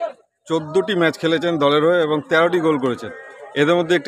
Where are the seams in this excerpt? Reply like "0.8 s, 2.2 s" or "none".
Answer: none